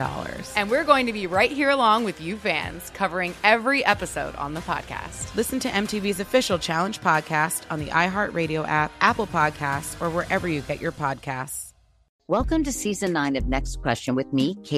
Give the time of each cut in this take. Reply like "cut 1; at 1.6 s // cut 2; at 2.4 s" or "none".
cut 1; at 12.0 s